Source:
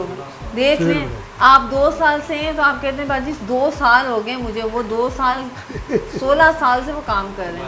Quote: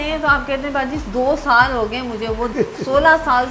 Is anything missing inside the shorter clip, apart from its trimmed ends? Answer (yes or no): yes